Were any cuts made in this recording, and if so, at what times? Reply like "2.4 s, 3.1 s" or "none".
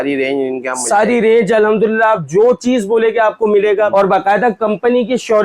3.9 s